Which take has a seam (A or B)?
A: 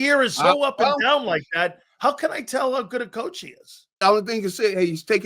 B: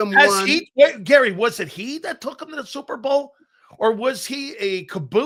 A